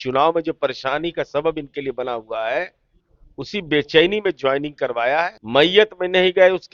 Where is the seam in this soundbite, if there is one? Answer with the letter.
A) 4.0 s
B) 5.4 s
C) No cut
B